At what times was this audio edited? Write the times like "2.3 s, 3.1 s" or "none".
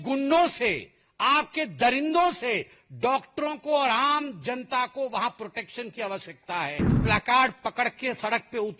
7.0 s